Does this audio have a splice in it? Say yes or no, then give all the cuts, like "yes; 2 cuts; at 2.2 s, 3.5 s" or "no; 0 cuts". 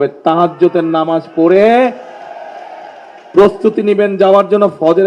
no; 0 cuts